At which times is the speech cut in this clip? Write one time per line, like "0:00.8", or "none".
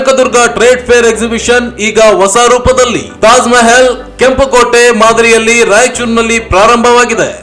none